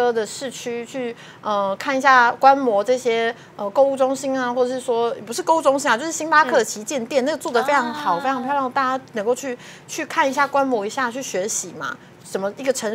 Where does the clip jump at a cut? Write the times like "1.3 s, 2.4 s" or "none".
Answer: none